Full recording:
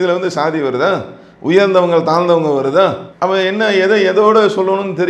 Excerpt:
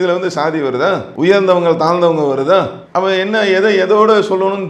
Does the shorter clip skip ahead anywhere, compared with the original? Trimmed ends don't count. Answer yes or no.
yes